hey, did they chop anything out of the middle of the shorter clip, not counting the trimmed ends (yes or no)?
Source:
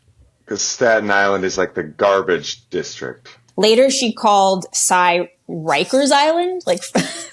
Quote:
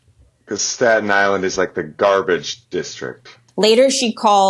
no